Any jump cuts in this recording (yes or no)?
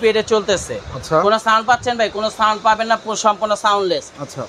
no